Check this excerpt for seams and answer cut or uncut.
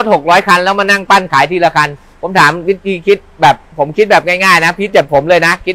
uncut